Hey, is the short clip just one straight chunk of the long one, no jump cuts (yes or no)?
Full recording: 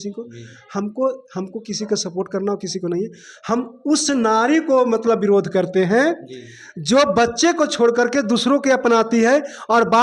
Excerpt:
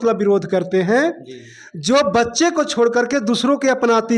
yes